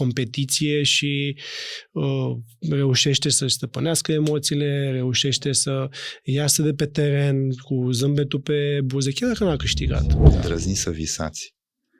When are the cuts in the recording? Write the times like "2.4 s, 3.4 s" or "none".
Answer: 10.2 s